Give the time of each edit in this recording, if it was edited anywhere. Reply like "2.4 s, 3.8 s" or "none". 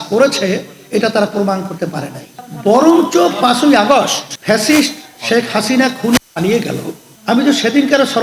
none